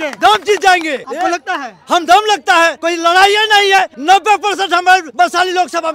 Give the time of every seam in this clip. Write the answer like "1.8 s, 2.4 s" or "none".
1.0 s, 2.8 s, 3.9 s, 5.1 s